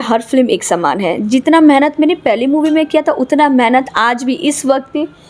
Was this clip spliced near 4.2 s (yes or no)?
no